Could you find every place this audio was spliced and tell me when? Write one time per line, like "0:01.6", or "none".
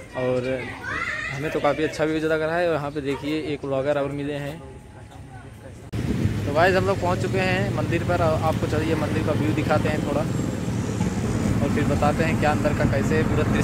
0:05.9